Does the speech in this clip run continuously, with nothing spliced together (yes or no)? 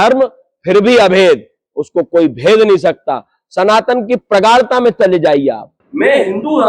no